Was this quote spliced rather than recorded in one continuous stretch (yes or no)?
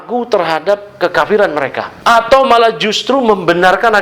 yes